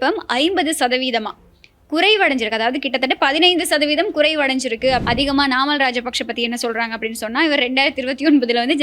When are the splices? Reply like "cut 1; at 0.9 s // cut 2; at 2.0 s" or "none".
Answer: cut 1; at 5.0 s